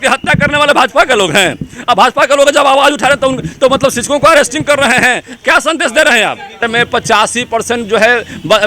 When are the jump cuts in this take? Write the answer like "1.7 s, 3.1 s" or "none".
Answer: 6.6 s